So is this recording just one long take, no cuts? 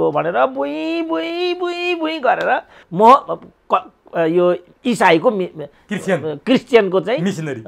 no; 1 cut; at 2.8 s

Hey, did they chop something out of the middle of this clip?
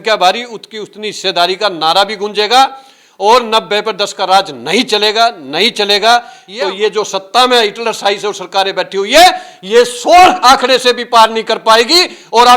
yes; 1 cut; at 6.4 s

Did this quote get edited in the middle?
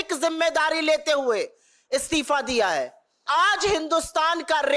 yes; 1 cut; at 3.2 s

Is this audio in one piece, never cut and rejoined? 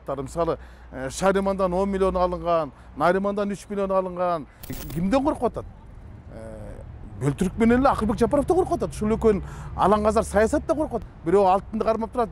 no; 2 cuts; at 4.8 s, 11.0 s

